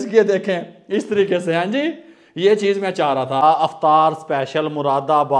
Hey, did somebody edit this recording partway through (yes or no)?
yes